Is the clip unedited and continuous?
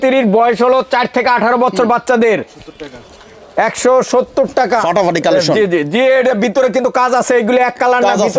no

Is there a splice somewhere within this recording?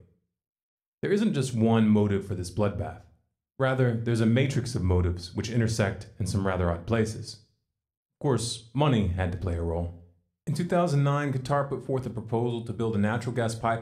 yes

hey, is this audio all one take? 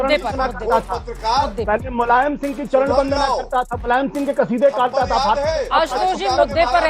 yes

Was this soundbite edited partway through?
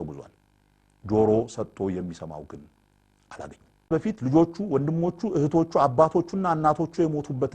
yes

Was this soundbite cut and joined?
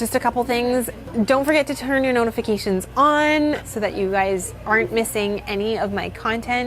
yes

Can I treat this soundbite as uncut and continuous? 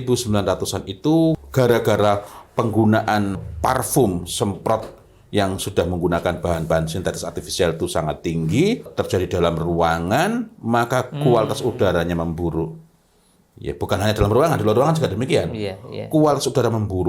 no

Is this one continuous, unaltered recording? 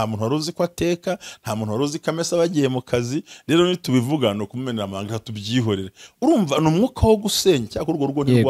yes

